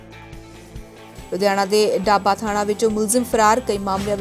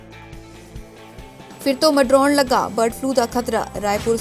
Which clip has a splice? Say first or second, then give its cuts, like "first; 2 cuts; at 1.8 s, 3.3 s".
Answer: second; 1 cut; at 1.1 s